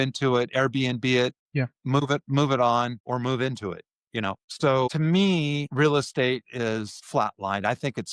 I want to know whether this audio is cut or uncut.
cut